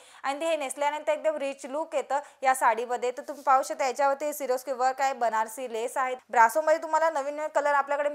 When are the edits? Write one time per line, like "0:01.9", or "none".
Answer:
0:06.2